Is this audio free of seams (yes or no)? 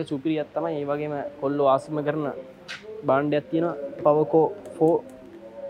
yes